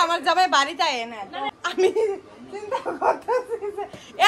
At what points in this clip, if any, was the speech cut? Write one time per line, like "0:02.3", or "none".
0:01.4